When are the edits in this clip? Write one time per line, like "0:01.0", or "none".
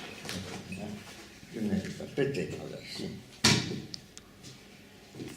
0:01.3